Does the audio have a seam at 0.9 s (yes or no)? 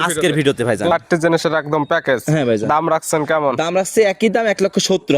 yes